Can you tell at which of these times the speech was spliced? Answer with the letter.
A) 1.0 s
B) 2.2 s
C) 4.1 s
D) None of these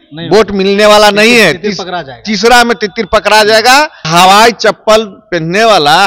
C